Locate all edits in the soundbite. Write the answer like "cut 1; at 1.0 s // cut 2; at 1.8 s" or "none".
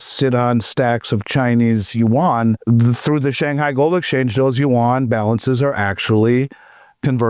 cut 1; at 2.6 s